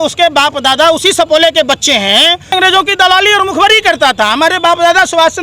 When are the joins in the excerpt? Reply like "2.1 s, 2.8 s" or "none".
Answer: none